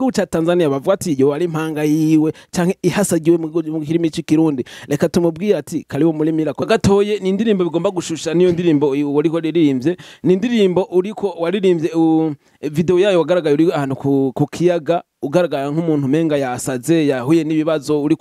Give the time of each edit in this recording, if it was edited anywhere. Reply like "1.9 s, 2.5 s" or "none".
6.6 s